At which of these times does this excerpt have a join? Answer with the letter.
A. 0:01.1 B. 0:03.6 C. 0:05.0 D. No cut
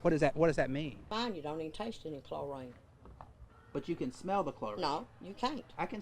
A